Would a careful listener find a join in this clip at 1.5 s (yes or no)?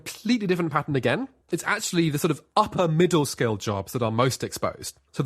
yes